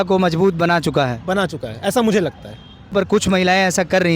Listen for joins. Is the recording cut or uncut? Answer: cut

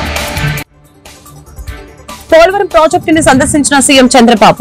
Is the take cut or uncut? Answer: cut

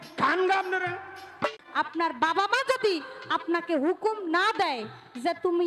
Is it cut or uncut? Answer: cut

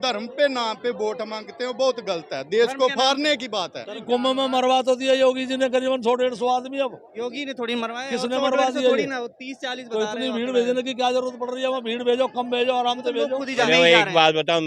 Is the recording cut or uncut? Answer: cut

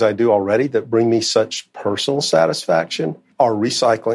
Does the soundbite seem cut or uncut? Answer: cut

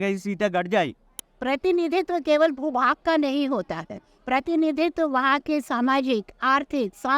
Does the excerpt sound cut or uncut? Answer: cut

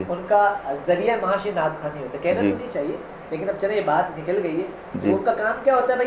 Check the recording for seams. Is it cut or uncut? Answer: uncut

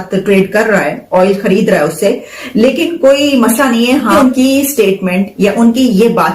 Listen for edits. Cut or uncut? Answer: cut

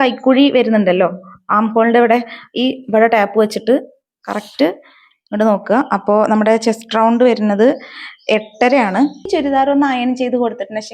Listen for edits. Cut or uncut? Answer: cut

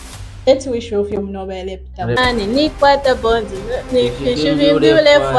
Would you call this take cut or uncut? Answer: cut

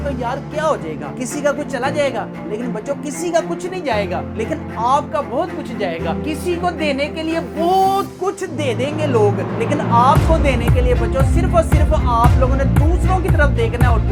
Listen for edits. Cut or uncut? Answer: uncut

